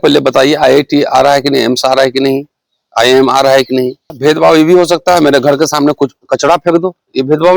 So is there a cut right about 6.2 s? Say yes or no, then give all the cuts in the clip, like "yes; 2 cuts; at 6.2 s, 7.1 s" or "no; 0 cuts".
no; 1 cut; at 4.1 s